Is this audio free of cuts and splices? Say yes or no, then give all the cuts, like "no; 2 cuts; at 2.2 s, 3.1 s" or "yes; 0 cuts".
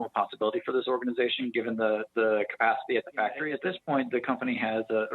no; 1 cut; at 3.5 s